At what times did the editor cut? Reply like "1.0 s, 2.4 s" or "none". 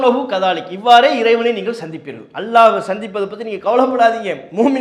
none